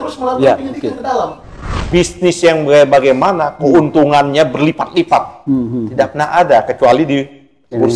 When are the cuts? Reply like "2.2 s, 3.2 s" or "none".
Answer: 1.9 s